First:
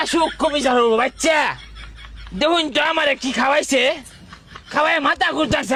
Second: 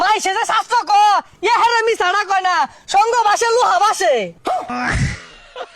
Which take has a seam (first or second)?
second